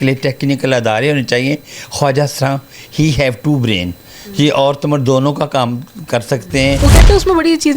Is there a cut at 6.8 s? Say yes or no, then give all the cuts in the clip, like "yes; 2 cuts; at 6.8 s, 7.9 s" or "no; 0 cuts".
yes; 1 cut; at 6.8 s